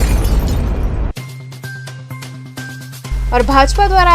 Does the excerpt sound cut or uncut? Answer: uncut